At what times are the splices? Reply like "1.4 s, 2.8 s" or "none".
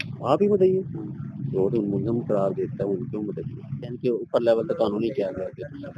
4.0 s